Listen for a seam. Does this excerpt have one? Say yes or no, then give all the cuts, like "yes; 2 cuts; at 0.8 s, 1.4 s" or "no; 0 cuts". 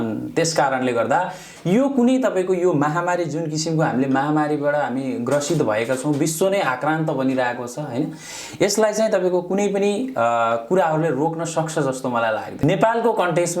yes; 1 cut; at 12.6 s